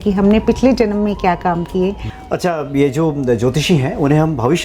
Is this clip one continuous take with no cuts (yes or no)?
no